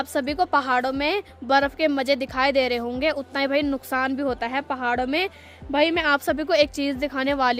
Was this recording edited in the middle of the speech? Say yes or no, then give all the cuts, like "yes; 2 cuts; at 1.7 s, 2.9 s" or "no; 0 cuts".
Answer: no; 0 cuts